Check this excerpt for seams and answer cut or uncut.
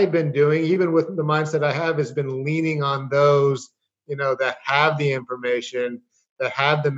uncut